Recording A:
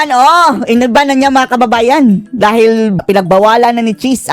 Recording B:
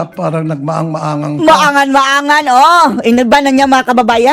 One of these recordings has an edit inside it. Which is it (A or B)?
A